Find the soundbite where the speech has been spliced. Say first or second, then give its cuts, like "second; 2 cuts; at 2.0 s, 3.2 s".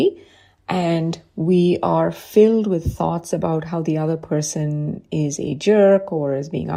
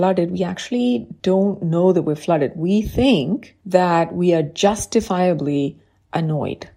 second; 1 cut; at 1.1 s